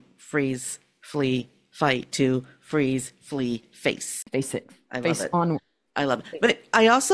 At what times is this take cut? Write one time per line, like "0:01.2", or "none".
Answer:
0:04.1